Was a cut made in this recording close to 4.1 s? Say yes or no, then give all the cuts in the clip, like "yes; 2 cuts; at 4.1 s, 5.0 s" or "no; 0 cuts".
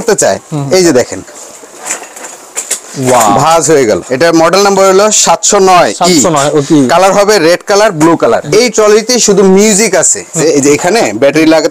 yes; 3 cuts; at 4.1 s, 8.4 s, 10.4 s